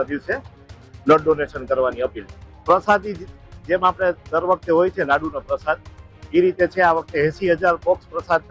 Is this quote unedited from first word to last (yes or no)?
yes